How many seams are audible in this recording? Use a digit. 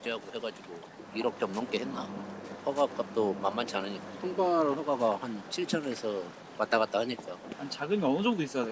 3